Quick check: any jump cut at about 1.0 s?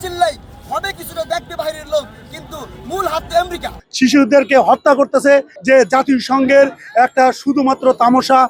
no; 2 cuts; at 3.8 s, 5.5 s

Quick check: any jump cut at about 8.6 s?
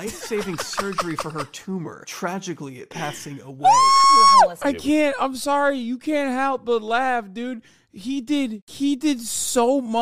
yes; 2 cuts; at 4.6 s, 8.6 s

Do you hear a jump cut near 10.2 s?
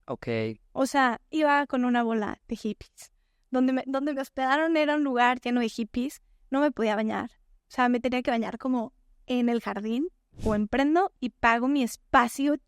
yes; 1 cut; at 10.2 s

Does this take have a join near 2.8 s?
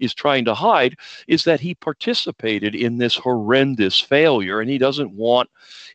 no; 0 cuts

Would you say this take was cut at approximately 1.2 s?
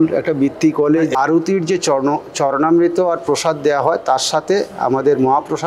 yes; 1 cut; at 1.2 s

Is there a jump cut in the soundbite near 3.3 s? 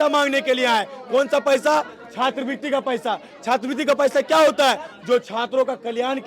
no; 0 cuts

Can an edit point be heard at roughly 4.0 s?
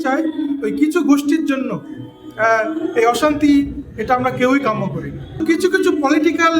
no; 1 cut; at 5.4 s

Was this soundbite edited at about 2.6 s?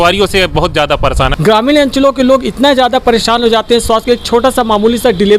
no; 1 cut; at 1.3 s

